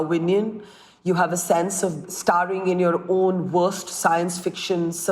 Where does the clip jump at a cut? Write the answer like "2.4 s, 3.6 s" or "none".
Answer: 2.0 s